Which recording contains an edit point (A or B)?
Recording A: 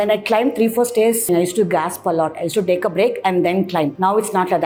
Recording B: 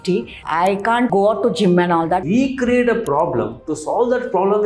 B